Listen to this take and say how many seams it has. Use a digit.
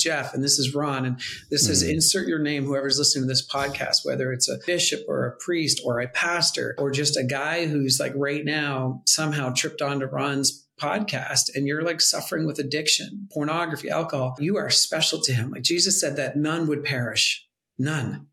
3